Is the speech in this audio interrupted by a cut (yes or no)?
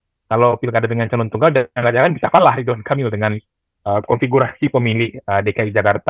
no